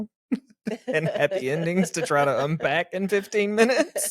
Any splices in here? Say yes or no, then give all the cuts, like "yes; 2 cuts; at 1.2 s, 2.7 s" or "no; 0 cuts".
no; 0 cuts